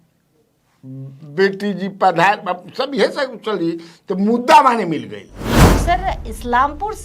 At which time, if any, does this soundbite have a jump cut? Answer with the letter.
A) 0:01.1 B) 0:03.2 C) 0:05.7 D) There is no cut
C